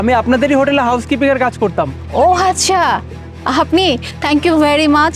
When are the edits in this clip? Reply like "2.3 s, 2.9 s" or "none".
2.0 s